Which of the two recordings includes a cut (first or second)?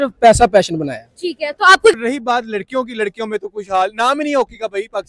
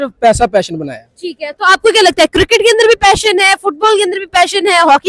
first